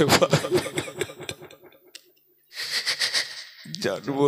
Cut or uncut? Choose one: cut